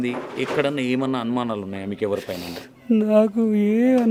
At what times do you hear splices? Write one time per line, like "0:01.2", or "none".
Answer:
none